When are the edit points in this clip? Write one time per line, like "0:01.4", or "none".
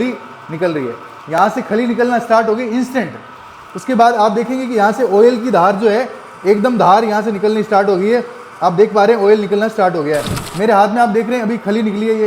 0:10.4